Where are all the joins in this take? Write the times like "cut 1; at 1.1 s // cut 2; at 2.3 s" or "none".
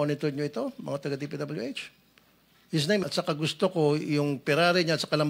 cut 1; at 3.0 s